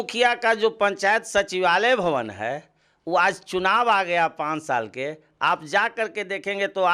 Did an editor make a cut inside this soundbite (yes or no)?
no